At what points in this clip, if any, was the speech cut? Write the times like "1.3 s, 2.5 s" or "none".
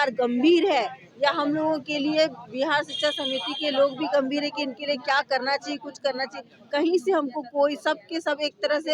none